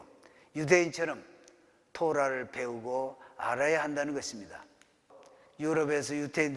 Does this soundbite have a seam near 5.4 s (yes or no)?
yes